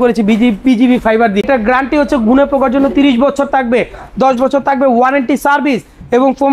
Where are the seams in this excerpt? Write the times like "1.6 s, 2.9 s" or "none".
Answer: 1.4 s